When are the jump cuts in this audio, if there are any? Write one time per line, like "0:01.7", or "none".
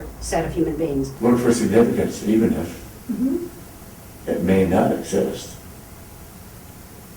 0:01.1